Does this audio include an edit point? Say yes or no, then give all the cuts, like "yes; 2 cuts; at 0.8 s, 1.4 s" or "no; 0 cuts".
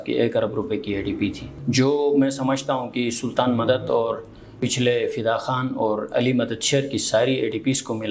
no; 0 cuts